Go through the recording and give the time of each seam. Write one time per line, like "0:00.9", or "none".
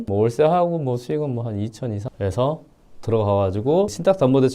0:02.1